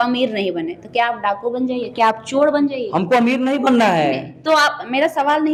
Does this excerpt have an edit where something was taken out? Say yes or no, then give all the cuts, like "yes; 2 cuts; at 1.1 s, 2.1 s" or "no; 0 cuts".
no; 0 cuts